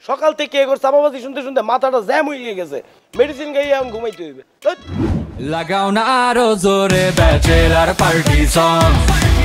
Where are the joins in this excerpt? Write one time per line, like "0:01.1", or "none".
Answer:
0:05.4